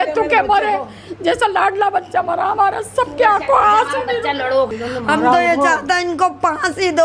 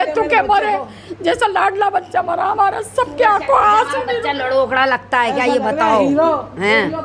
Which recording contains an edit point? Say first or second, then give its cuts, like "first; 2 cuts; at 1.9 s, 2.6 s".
first; 1 cut; at 4.7 s